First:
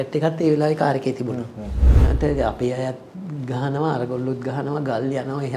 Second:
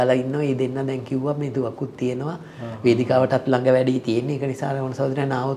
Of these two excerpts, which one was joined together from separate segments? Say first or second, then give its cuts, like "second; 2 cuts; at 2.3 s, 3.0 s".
first; 1 cut; at 1.9 s